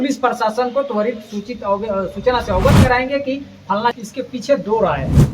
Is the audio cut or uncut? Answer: cut